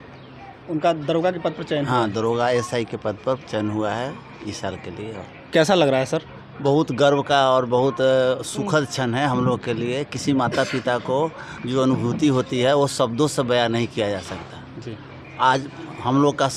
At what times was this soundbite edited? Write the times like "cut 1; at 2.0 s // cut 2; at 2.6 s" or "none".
none